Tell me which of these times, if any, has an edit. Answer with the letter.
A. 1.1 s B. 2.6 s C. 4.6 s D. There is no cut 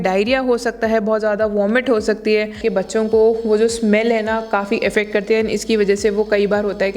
B